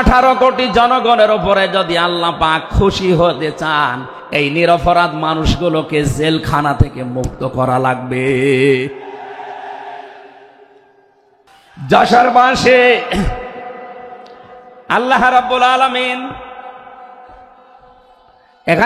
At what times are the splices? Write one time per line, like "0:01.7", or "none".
0:11.6